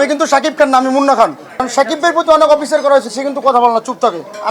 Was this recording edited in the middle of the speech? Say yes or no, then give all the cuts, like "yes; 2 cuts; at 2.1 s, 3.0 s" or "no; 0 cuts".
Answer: no; 0 cuts